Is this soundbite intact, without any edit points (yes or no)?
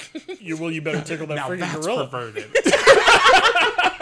yes